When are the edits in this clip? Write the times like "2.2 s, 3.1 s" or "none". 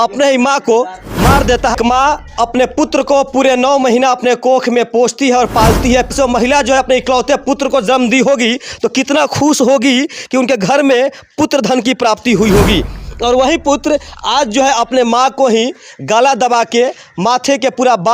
1.7 s, 6.1 s